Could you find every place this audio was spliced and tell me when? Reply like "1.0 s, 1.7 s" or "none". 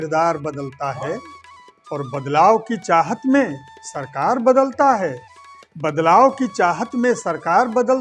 none